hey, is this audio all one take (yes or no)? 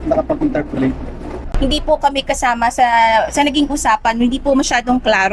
no